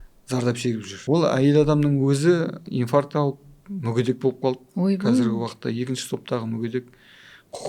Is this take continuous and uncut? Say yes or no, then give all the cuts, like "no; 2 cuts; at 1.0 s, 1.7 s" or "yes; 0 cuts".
no; 2 cuts; at 0.9 s, 2.6 s